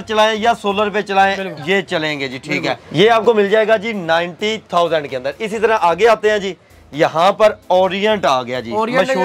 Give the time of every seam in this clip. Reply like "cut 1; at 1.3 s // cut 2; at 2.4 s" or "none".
none